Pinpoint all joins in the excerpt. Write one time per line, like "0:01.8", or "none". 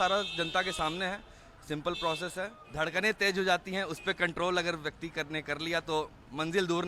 0:02.6